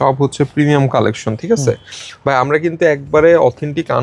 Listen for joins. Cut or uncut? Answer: uncut